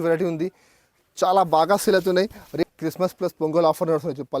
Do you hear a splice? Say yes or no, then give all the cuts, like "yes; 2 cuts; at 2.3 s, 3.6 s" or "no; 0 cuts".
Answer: yes; 1 cut; at 2.6 s